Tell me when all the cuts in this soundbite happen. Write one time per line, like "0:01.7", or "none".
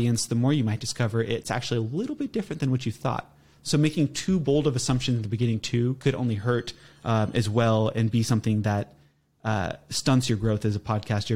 none